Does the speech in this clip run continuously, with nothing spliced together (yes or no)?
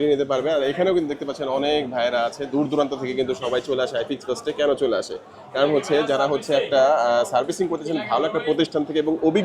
yes